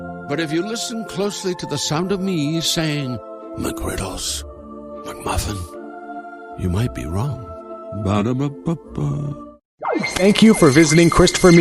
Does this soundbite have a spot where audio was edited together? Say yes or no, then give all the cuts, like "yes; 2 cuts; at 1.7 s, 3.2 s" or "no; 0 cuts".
yes; 1 cut; at 9.7 s